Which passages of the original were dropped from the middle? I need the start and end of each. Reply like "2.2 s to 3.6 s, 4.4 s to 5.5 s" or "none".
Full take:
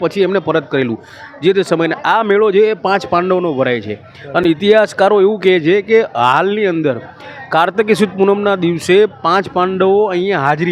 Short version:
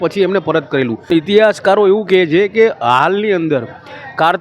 1.1 s to 4.4 s